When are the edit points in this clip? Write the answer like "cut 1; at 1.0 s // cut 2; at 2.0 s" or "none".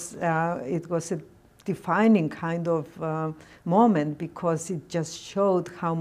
none